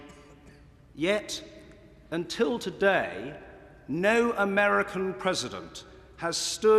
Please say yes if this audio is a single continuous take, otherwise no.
no